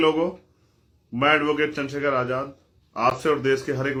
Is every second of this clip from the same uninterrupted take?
yes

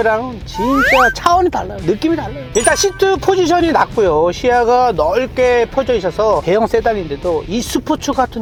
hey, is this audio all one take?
yes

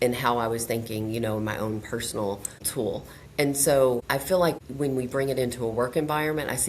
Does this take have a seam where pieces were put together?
yes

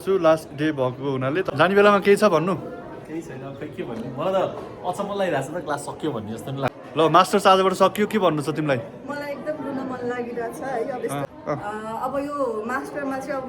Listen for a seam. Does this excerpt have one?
yes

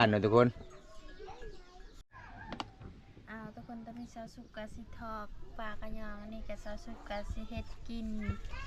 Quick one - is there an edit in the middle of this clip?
no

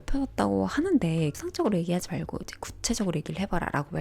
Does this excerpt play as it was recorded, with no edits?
no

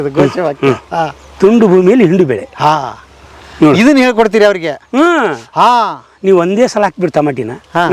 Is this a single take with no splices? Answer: yes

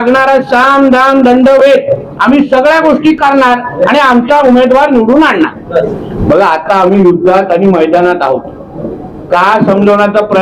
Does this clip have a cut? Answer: yes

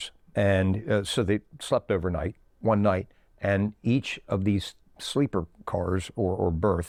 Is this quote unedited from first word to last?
yes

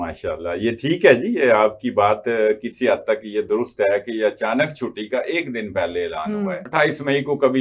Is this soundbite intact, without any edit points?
no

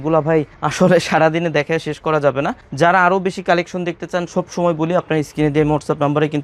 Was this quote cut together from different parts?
no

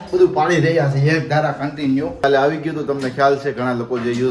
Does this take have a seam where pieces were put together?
yes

